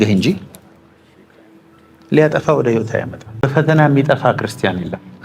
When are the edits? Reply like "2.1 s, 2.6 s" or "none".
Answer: 3.4 s